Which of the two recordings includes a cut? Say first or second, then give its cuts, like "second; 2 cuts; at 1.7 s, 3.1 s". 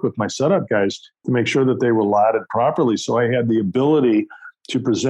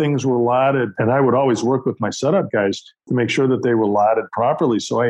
second; 1 cut; at 0.9 s